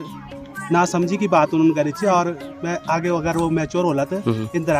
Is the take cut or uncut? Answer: uncut